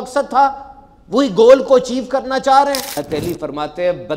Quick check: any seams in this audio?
yes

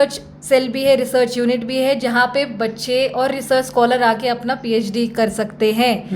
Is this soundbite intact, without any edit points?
yes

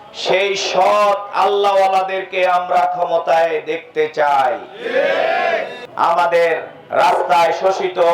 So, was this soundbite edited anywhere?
yes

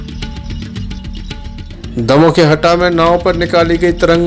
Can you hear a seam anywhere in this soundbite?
yes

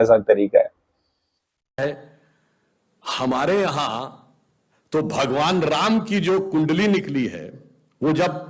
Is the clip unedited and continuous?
no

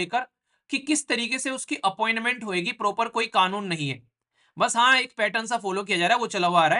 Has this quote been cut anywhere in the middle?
no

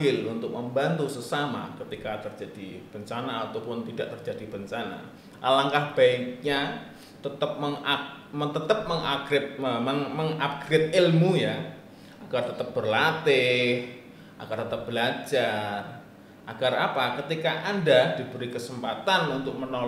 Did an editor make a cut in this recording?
no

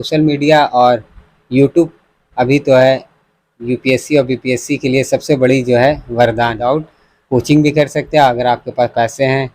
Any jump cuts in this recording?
yes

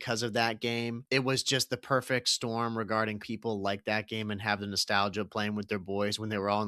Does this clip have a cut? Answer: yes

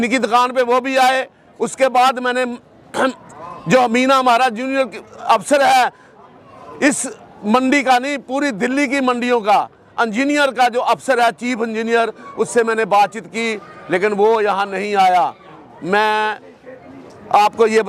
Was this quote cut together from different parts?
no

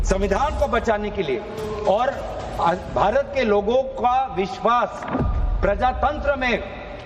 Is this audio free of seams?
yes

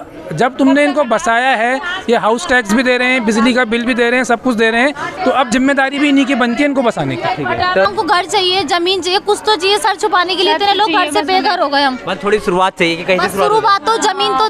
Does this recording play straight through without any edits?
no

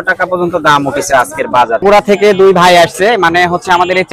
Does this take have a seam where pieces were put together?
yes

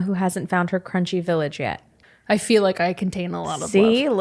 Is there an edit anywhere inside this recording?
yes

